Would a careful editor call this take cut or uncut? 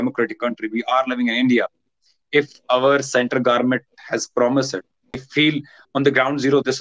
cut